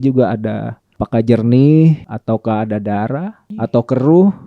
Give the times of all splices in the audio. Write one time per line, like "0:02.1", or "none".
0:01.0
0:02.1
0:03.4